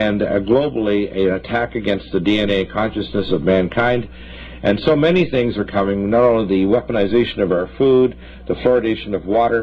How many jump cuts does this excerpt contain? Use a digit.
1